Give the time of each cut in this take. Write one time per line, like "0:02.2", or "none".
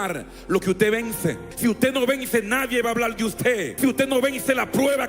0:01.5
0:03.7

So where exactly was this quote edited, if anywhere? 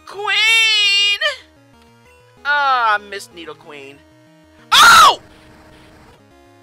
none

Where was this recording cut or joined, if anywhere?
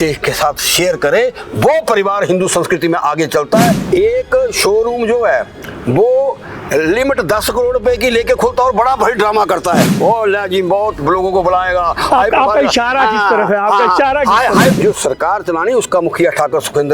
0:03.8
0:14.7

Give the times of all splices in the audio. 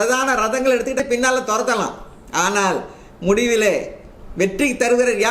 0:01.0

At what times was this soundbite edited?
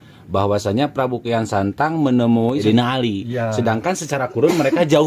0:02.6

